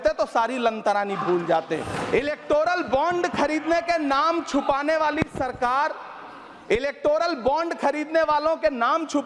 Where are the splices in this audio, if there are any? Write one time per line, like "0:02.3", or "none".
0:01.9

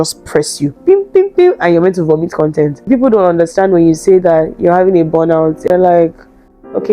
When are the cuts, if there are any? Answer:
0:02.8

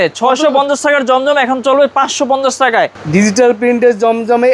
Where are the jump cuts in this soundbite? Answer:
0:03.0

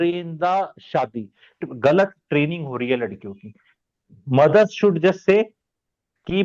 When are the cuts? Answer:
0:01.6

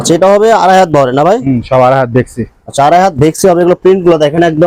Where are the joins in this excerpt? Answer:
none

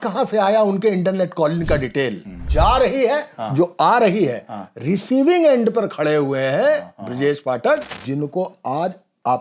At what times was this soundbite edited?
0:02.4
0:07.9

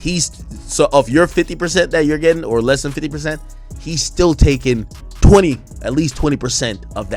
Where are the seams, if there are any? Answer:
none

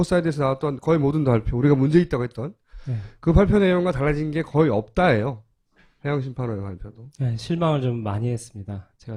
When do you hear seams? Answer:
none

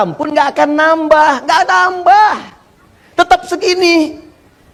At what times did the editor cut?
none

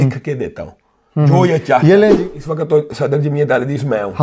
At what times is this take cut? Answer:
0:02.2

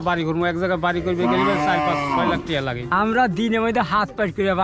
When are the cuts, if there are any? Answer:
0:02.8

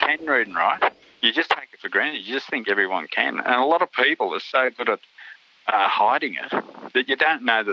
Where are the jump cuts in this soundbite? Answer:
0:01.1

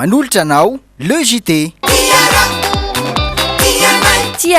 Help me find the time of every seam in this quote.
0:01.8

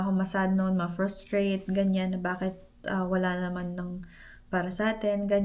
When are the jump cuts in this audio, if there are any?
none

